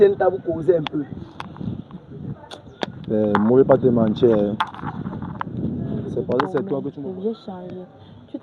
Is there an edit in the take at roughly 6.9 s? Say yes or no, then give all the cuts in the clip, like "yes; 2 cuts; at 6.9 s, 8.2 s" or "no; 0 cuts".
yes; 1 cut; at 6.9 s